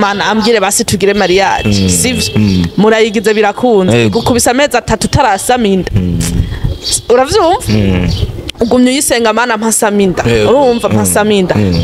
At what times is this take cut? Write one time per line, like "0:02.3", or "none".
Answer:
none